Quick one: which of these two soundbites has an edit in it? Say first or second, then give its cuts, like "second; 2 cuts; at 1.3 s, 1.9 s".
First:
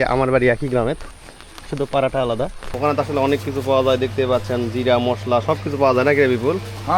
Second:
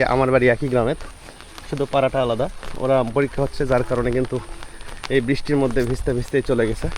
first; 1 cut; at 2.6 s